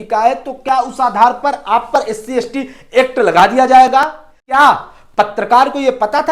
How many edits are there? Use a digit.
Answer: 1